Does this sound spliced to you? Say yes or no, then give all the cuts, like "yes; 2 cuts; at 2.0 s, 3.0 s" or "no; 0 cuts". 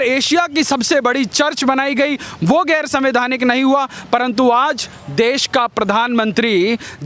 no; 0 cuts